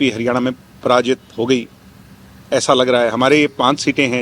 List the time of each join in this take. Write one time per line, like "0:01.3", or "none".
none